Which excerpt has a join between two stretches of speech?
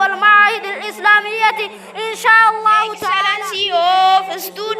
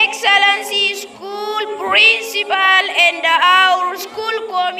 first; 1 cut; at 3.3 s

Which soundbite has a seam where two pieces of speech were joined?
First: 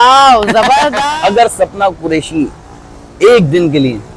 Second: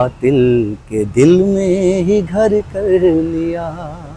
first; 1 cut; at 1.0 s

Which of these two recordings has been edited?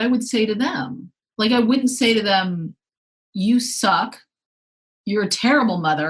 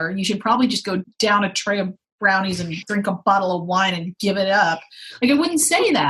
second; 1 cut; at 1.1 s

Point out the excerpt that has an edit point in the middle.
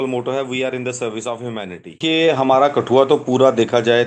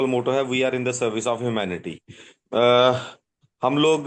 first; 1 cut; at 2.0 s

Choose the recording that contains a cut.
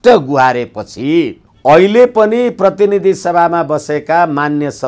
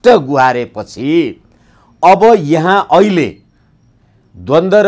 first; 1 cut; at 1.4 s

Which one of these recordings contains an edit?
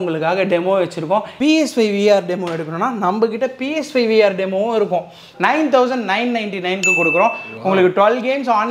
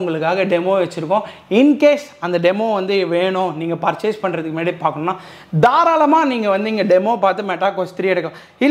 first; 2 cuts; at 1.3 s, 5.3 s

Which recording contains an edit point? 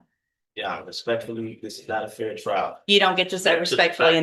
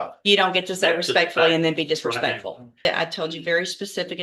second; 1 cut; at 2.9 s

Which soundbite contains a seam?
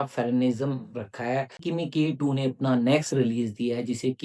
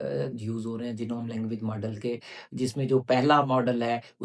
first; 1 cut; at 1.6 s

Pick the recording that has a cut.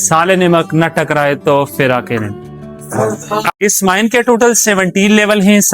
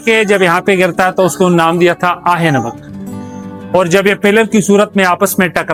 first; 1 cut; at 3.5 s

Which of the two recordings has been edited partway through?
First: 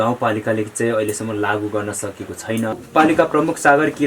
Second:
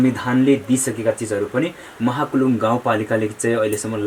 first; 1 cut; at 2.9 s

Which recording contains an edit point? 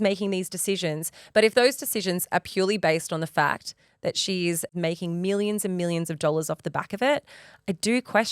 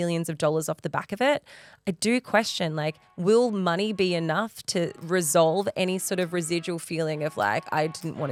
first; 1 cut; at 4.7 s

